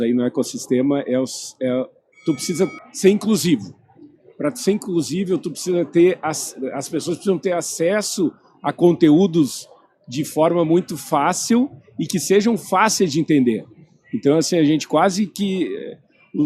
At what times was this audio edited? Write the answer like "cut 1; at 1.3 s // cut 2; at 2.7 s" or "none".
cut 1; at 2.8 s